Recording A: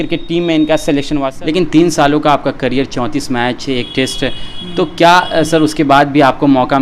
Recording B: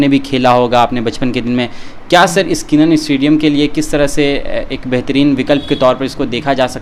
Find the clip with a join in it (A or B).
A